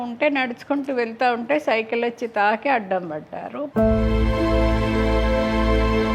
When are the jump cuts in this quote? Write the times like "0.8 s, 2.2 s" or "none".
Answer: 3.6 s